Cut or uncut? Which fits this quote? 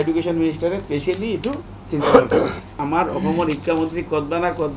cut